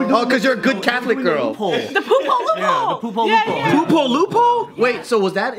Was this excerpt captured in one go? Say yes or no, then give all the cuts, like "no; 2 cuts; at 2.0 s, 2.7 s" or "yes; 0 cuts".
yes; 0 cuts